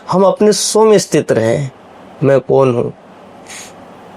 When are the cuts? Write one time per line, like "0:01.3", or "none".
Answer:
none

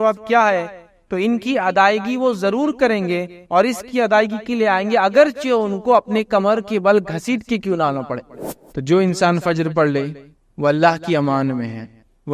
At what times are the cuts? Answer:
0:08.4

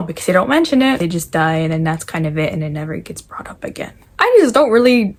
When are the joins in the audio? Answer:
none

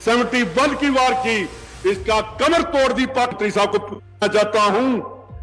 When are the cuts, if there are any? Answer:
0:03.3

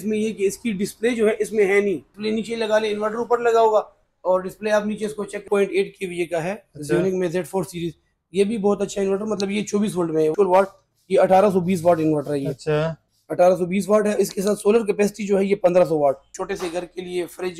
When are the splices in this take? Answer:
0:02.1
0:05.4
0:10.3
0:16.3

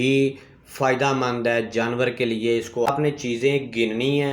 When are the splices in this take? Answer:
0:02.9

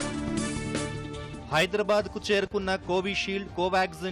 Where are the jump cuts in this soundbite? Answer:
none

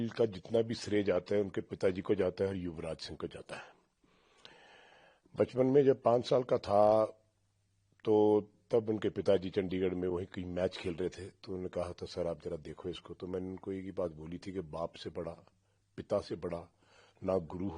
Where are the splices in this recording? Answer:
none

